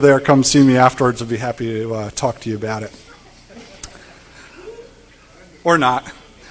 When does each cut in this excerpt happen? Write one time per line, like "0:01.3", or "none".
none